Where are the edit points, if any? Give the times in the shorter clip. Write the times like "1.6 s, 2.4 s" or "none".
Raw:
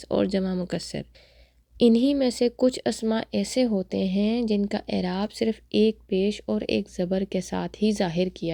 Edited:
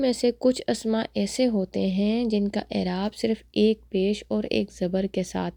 none